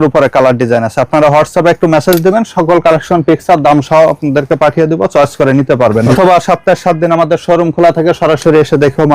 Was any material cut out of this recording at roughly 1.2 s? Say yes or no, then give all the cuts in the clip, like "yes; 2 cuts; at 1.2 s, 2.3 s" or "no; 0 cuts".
no; 1 cut; at 6.1 s